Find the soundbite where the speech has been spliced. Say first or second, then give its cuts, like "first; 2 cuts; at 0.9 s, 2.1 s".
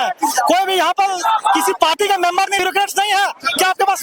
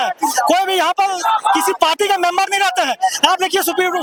first; 1 cut; at 2.6 s